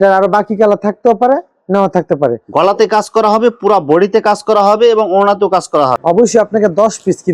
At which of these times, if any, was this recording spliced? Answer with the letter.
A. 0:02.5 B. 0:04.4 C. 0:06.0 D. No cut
C